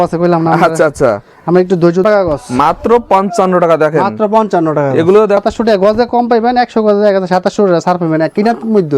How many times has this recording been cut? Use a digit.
2